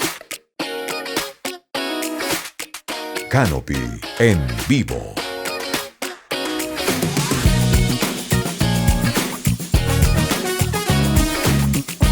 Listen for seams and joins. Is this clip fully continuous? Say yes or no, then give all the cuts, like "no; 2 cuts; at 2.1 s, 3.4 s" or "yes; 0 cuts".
no; 1 cut; at 3.2 s